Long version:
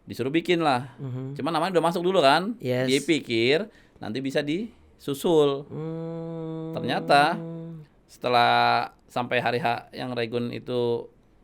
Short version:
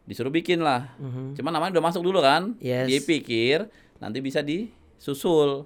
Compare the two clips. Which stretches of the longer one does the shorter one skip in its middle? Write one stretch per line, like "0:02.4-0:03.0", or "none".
none